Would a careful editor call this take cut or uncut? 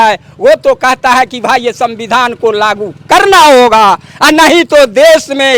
uncut